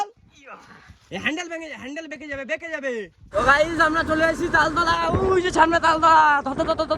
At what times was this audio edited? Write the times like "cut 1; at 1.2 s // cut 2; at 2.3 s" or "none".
cut 1; at 3.3 s